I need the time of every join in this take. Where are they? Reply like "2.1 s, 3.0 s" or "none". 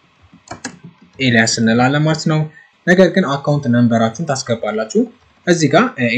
2.6 s